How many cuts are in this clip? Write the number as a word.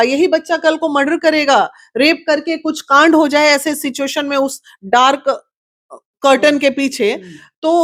zero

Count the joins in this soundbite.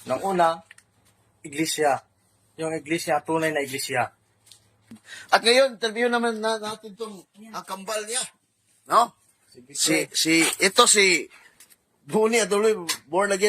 one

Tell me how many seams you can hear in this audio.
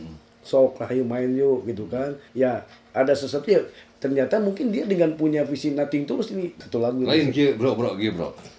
two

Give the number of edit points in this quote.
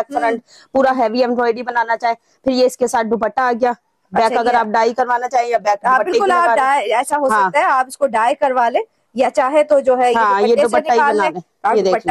zero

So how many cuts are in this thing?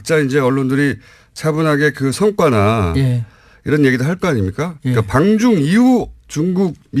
one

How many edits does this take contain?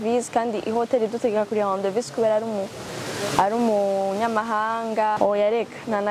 one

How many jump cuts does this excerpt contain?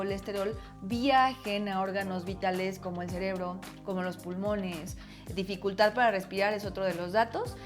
one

